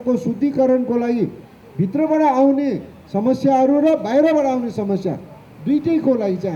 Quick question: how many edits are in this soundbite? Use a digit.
0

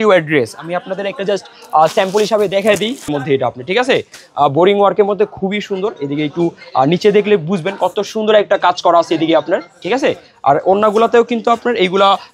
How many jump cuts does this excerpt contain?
1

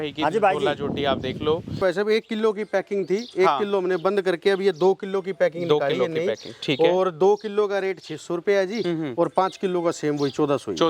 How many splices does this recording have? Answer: 1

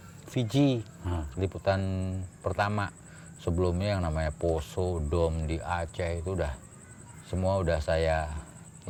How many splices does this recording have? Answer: 0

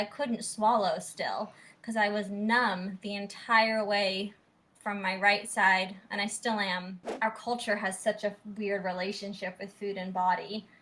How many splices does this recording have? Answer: 1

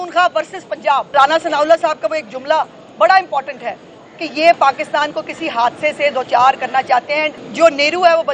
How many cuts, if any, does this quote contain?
2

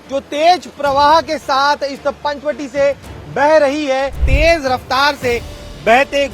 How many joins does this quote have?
1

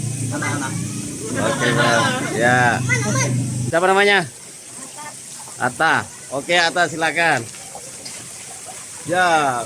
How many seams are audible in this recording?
1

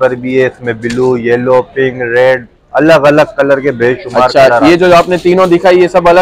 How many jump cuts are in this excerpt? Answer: 0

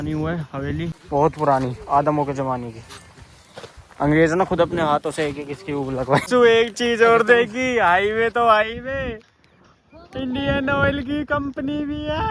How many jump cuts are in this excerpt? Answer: 2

